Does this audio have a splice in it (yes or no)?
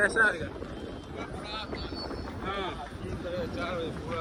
no